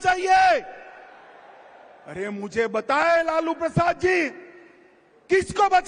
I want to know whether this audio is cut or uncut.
uncut